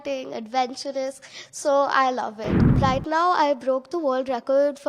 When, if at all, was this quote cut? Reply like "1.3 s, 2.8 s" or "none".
2.7 s